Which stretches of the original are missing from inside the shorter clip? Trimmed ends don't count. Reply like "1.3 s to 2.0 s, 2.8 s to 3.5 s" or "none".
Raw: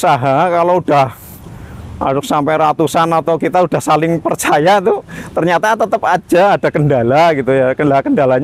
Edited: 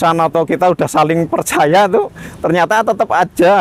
none